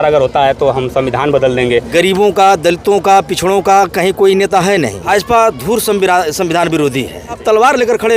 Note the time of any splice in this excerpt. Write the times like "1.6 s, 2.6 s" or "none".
1.9 s, 5.0 s, 7.4 s